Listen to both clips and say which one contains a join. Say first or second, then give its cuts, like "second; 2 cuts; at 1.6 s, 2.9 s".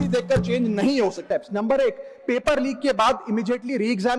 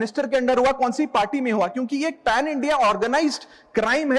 first; 1 cut; at 1.2 s